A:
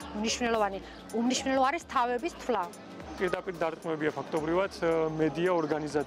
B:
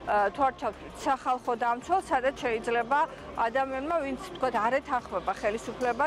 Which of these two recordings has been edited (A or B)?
A